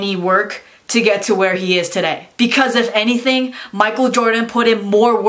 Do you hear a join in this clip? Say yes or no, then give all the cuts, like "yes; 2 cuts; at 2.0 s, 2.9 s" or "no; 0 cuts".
no; 0 cuts